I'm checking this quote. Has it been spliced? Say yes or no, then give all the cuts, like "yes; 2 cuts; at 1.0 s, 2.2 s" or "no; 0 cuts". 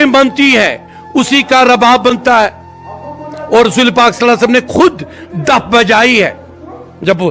no; 0 cuts